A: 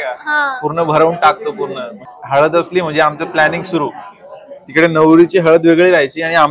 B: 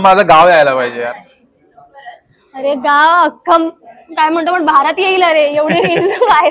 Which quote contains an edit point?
A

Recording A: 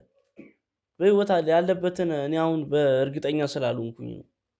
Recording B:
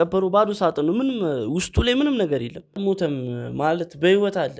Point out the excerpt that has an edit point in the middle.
B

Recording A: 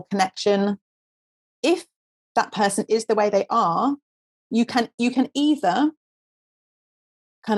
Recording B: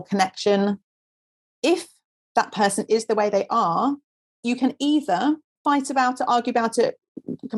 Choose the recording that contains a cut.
B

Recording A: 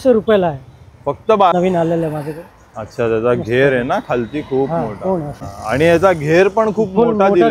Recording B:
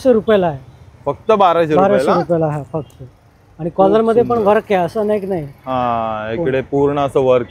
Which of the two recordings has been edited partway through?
A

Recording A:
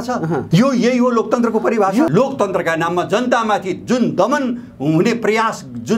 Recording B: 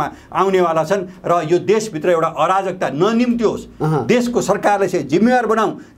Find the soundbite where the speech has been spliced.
A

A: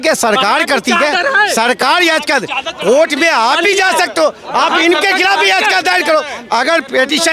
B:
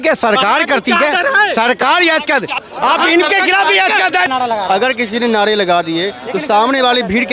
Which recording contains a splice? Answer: B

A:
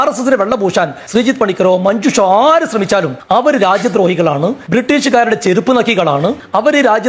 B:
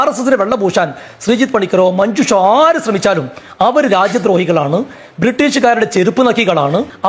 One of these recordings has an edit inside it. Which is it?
A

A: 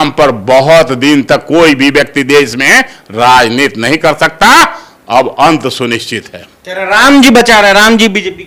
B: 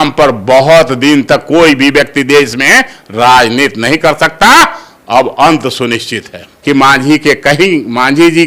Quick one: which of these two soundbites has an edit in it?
B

